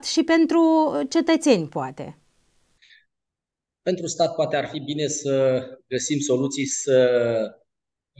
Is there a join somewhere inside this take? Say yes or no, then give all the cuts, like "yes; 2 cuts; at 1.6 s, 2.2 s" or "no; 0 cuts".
no; 0 cuts